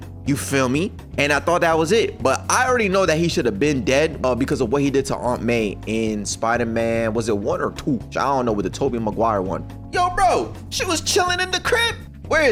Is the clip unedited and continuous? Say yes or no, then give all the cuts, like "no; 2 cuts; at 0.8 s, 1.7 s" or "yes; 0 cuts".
yes; 0 cuts